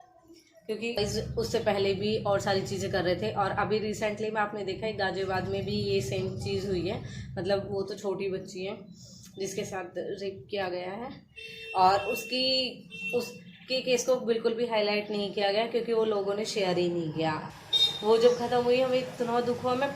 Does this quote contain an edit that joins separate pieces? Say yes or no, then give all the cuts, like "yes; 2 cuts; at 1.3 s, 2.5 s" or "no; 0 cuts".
yes; 2 cuts; at 1.0 s, 17.5 s